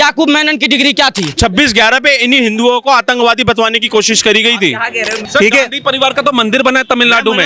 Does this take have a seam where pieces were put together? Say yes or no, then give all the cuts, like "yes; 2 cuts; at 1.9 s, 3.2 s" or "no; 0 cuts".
yes; 2 cuts; at 1.3 s, 5.2 s